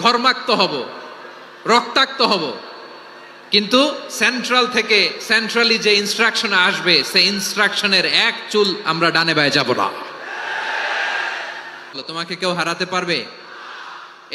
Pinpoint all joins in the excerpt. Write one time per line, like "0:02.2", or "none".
0:12.0